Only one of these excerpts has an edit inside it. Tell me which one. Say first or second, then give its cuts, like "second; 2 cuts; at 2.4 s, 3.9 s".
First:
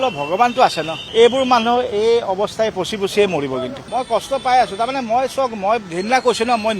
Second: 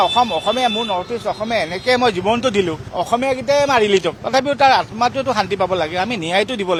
first; 2 cuts; at 1.0 s, 3.8 s